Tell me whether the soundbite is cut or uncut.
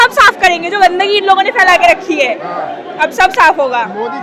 uncut